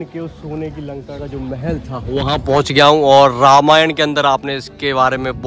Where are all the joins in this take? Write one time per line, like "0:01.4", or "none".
none